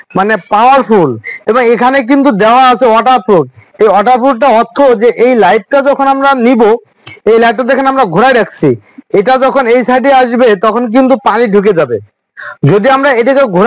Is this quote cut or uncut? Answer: uncut